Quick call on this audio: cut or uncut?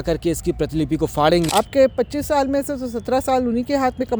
cut